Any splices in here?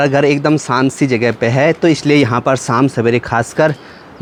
no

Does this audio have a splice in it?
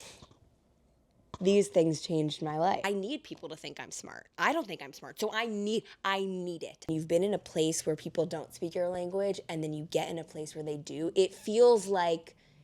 yes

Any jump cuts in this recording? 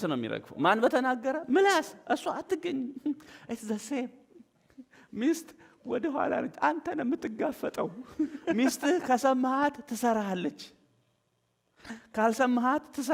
yes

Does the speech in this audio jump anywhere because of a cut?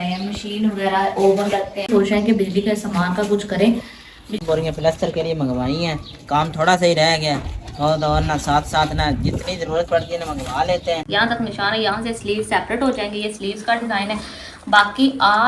yes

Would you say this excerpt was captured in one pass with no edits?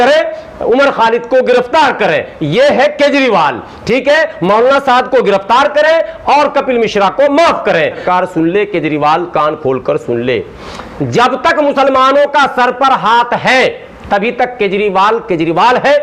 no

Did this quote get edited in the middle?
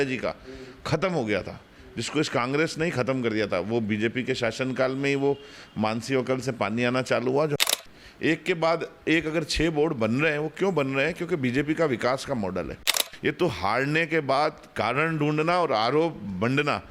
yes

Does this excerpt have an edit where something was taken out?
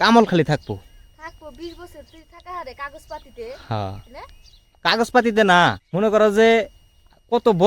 yes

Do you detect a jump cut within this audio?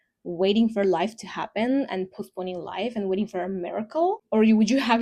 no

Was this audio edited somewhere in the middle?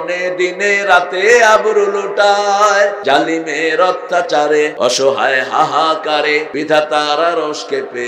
yes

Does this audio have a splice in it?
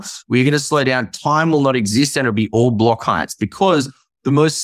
no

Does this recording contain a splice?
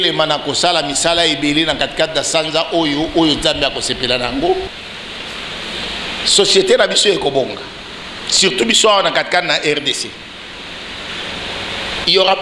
yes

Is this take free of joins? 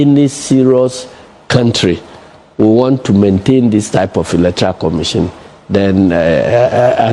yes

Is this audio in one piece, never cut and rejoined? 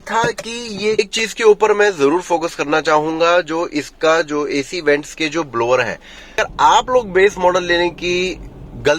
no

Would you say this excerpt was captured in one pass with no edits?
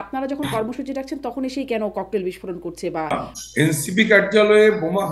no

